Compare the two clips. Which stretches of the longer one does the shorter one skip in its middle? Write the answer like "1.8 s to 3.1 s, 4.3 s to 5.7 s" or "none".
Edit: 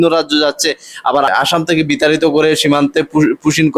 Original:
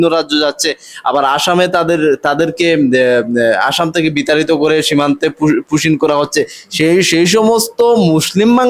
1.3 s to 3.6 s